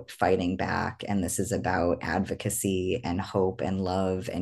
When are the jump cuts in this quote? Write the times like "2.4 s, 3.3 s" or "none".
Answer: none